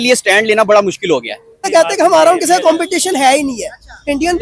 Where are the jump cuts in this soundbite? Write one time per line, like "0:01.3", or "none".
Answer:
0:01.6